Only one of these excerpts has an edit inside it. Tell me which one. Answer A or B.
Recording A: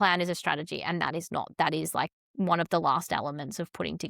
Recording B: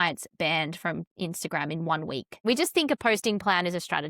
B